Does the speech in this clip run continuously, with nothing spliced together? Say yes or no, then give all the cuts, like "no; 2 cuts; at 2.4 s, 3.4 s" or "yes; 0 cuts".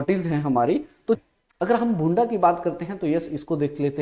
no; 1 cut; at 1.2 s